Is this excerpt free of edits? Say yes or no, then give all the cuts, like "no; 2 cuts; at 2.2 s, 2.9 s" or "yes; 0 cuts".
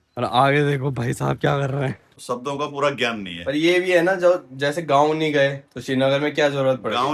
no; 1 cut; at 2.1 s